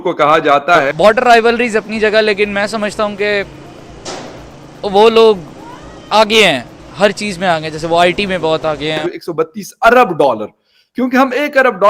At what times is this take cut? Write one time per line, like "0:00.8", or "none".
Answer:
0:00.9
0:09.0